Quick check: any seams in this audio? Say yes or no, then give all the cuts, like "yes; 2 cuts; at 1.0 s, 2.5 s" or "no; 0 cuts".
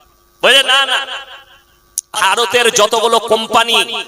yes; 1 cut; at 2.1 s